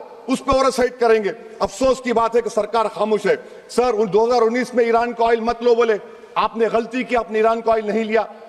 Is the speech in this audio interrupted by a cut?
no; 0 cuts

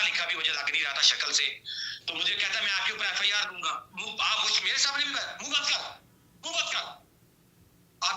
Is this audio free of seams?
no; 1 cut; at 3.9 s

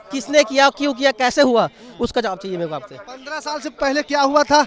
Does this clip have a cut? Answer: no; 0 cuts

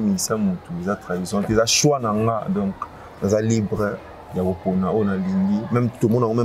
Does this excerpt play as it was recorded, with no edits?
yes; 0 cuts

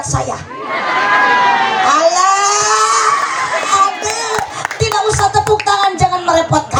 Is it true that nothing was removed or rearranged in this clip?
yes; 0 cuts

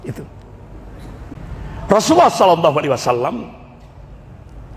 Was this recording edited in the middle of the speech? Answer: yes; 1 cut; at 1.3 s

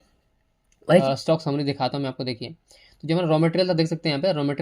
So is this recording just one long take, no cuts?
no; 1 cut; at 1.0 s

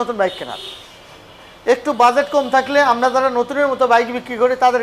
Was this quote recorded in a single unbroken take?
yes; 0 cuts

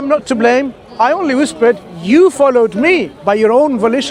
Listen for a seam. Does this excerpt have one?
no; 0 cuts

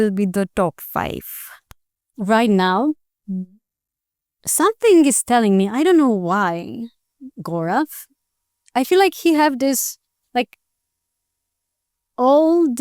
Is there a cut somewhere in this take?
no; 0 cuts

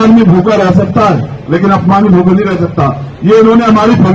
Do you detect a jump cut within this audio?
no; 0 cuts

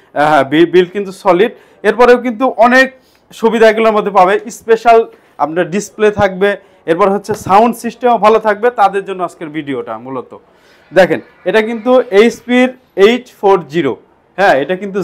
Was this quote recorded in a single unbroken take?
yes; 0 cuts

